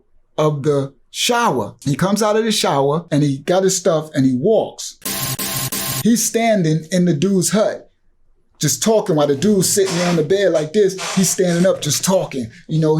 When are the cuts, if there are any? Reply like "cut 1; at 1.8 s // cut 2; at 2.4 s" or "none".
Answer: cut 1; at 1.8 s // cut 2; at 3.0 s // cut 3; at 5.4 s